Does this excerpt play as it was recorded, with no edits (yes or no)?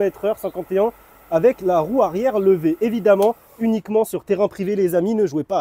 yes